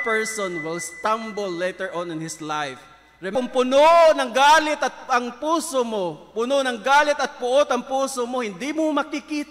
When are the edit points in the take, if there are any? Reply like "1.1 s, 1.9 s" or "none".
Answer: 3.3 s